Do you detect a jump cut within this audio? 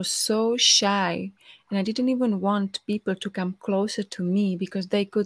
no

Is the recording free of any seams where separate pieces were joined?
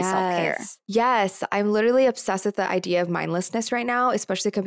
yes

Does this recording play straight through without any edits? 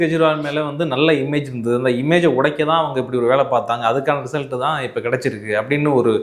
yes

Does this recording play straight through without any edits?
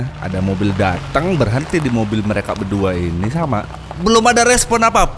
no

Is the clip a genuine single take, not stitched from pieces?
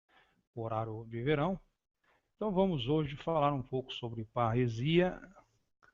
no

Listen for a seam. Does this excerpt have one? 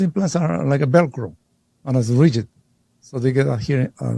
no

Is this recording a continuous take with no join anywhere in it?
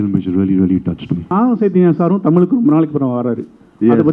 no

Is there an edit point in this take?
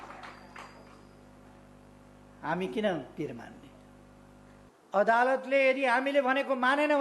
yes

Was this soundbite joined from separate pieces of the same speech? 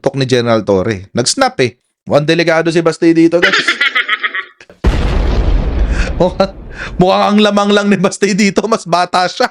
yes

